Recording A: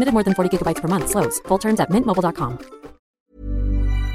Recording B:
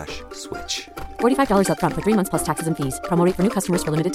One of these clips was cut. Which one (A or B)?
A